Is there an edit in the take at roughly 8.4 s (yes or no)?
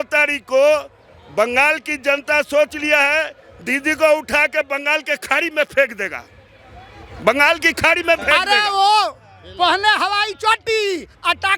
yes